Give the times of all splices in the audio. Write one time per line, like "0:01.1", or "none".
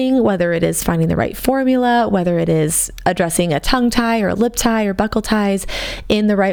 none